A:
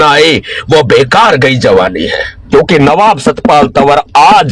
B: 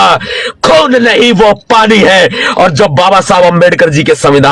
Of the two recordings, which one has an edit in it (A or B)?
A